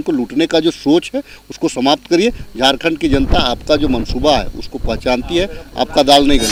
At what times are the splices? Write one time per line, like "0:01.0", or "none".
none